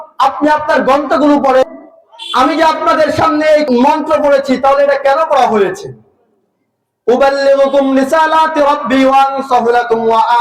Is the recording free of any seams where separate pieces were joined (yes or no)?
no